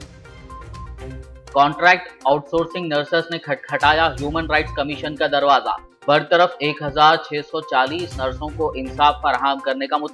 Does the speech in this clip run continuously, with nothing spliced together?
no; 1 cut; at 1.1 s

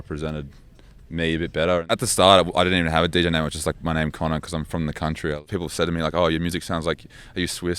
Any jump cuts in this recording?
yes; 2 cuts; at 1.9 s, 5.4 s

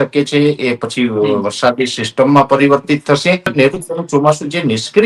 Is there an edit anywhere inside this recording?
yes; 1 cut; at 3.5 s

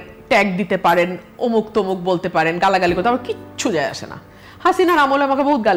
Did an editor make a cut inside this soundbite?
no; 0 cuts

